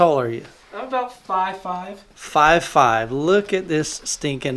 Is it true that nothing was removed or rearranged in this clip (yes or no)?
yes